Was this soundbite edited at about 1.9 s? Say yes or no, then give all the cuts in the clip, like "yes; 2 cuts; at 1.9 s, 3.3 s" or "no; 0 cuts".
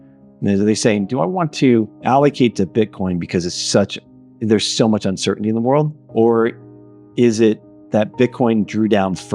yes; 2 cuts; at 1.9 s, 6.0 s